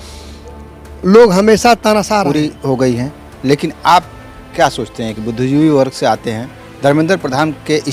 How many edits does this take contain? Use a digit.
1